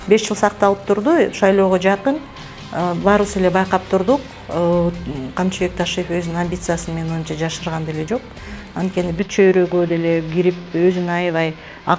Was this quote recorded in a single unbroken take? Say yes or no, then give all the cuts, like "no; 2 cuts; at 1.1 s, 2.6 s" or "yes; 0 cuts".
yes; 0 cuts